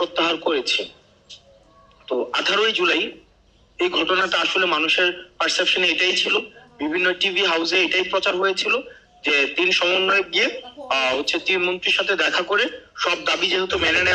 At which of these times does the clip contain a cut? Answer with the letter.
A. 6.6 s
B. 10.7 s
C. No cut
C